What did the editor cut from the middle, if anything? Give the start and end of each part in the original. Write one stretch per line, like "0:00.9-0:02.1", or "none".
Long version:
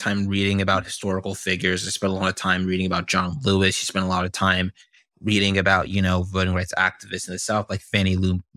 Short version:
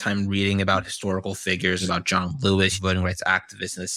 0:01.8-0:02.8
0:03.8-0:06.3